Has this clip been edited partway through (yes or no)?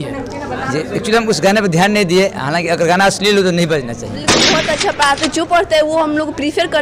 yes